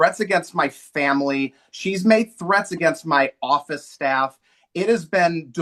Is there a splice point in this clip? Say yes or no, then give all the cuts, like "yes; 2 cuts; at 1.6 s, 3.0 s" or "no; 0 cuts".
no; 0 cuts